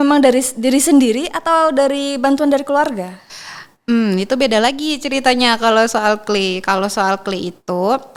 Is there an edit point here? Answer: no; 0 cuts

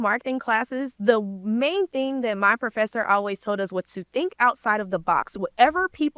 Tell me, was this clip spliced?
yes; 1 cut; at 0.9 s

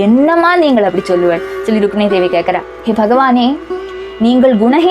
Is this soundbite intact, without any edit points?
yes; 0 cuts

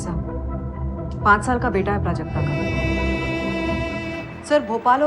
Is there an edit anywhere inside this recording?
yes; 1 cut; at 2.6 s

